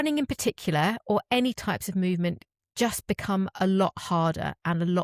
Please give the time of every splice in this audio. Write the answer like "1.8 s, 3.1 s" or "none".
none